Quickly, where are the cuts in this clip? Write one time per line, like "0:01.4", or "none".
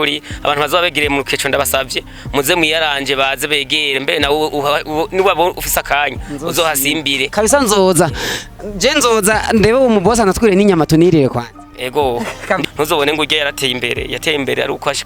0:12.6